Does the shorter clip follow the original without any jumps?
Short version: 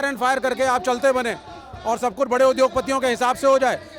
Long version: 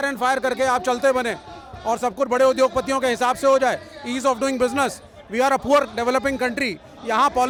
yes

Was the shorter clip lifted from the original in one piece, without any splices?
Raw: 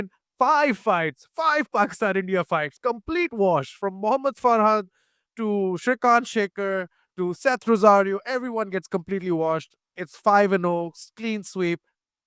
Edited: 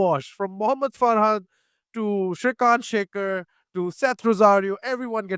yes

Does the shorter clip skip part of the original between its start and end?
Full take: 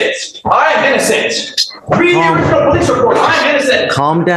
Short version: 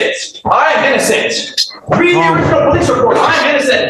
no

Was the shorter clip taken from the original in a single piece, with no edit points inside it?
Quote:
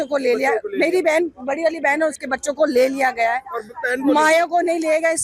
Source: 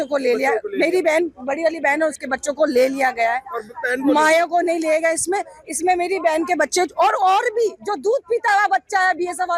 yes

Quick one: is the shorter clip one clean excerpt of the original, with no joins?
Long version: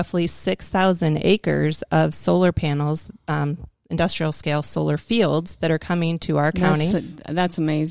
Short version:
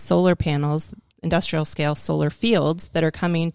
no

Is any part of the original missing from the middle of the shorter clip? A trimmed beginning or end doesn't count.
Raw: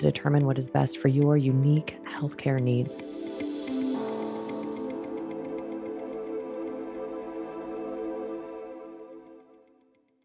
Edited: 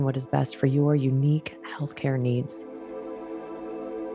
yes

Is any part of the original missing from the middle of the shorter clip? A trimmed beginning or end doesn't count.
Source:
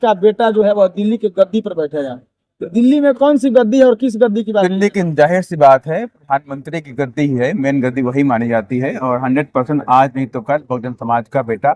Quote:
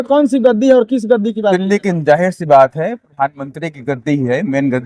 no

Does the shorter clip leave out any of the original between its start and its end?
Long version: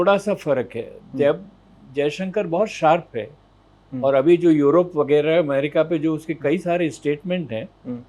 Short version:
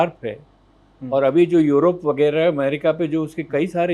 no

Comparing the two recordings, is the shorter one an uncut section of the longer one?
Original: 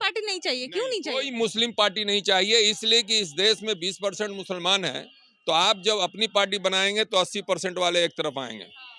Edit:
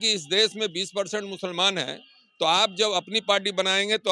yes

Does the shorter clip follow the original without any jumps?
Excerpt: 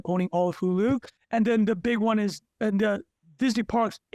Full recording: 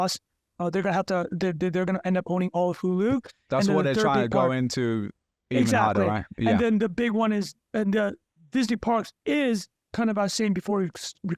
no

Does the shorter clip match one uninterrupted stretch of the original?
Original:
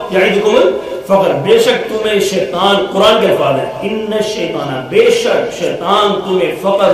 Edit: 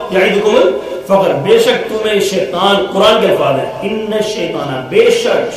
yes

